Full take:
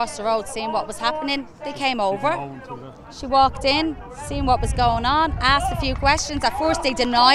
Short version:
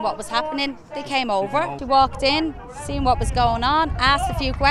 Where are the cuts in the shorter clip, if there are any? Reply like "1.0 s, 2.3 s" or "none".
1.8 s